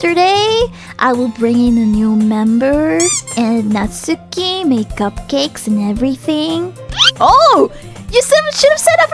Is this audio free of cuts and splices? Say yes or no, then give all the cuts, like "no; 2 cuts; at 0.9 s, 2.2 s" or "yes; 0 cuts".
no; 1 cut; at 3.2 s